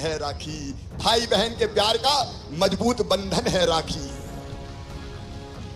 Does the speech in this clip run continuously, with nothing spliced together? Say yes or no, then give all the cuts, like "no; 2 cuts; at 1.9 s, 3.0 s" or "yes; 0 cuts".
no; 1 cut; at 4.2 s